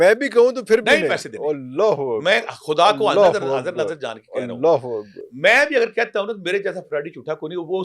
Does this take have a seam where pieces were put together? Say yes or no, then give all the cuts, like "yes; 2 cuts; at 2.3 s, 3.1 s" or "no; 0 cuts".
no; 0 cuts